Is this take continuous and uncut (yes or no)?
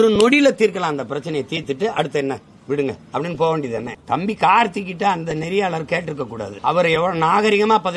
no